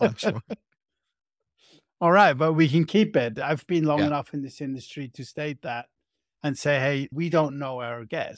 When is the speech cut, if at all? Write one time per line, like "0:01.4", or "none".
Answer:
0:03.4
0:07.1